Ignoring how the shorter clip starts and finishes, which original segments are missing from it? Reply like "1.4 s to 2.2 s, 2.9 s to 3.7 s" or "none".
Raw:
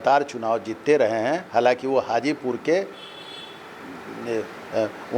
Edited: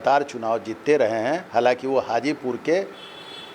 none